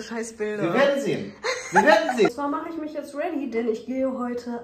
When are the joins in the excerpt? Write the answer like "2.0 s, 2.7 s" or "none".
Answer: 2.3 s